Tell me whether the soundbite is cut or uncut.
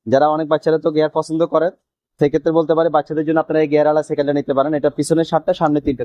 uncut